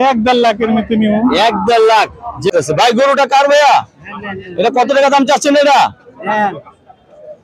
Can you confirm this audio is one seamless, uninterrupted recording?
no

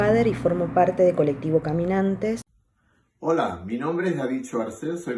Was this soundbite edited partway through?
yes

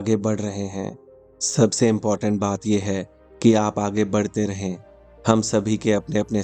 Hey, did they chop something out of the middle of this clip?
no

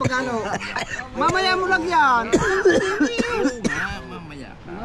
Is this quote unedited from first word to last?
yes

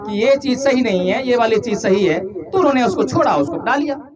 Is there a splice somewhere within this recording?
no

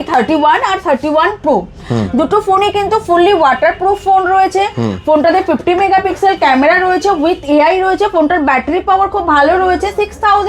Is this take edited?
no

